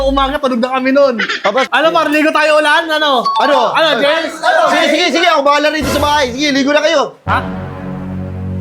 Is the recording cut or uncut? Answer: cut